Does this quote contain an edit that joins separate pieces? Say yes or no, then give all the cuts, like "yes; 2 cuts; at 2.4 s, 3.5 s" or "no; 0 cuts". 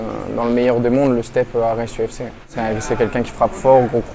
yes; 1 cut; at 2.5 s